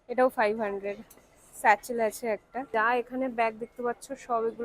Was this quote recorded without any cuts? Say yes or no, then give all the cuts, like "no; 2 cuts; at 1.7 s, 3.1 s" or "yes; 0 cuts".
no; 1 cut; at 2.5 s